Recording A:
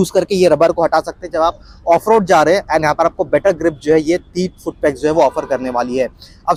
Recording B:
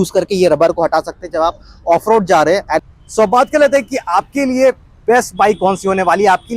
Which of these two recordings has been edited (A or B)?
B